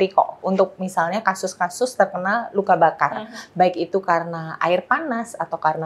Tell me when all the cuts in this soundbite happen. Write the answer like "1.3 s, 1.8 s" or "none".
none